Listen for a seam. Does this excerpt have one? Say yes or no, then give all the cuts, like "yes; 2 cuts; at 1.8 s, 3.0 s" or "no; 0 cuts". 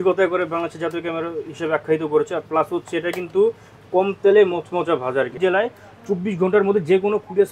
yes; 1 cut; at 5.3 s